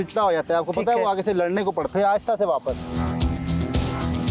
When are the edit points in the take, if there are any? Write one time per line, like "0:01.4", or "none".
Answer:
0:01.9

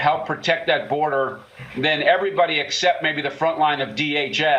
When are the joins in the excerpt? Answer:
none

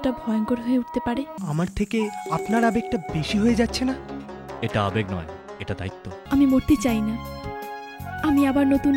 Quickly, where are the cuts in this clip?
0:01.4
0:06.2

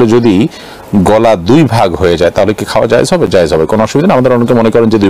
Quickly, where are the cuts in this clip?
none

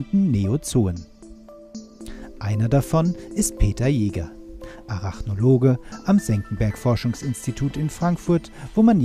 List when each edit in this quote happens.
none

